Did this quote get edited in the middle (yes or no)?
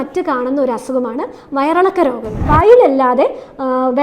yes